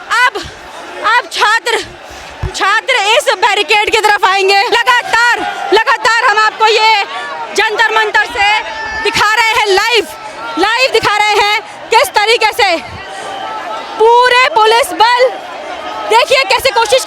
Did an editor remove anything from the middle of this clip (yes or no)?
yes